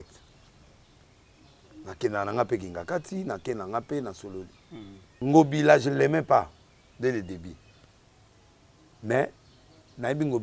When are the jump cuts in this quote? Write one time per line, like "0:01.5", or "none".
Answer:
0:05.0